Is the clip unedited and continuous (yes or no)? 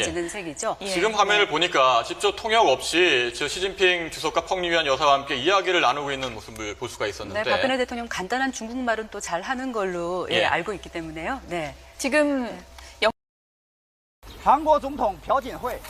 no